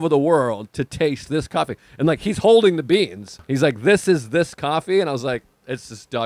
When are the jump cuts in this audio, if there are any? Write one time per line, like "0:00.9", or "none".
0:03.4